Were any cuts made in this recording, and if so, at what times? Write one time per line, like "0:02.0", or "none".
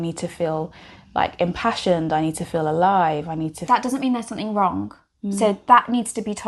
0:03.6